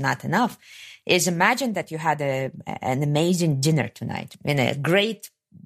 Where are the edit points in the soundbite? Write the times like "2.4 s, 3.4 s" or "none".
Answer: 4.2 s